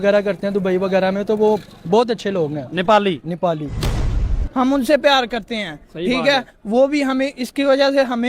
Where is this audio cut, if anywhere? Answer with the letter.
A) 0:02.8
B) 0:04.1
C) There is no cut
B